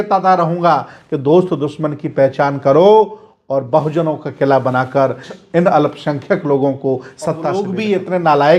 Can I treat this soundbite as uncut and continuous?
no; 2 cuts; at 5.3 s, 7.5 s

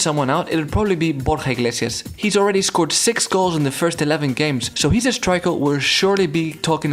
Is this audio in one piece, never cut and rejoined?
no; 2 cuts; at 2.1 s, 4.7 s

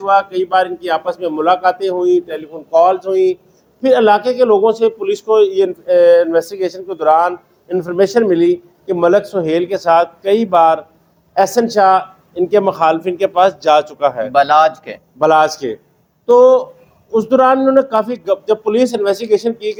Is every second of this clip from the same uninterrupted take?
yes; 0 cuts

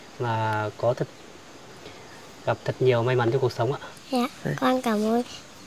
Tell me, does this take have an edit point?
yes; 1 cut; at 3.9 s

